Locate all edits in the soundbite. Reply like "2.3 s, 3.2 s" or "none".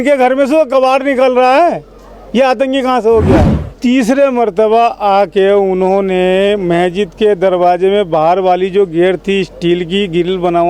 3.6 s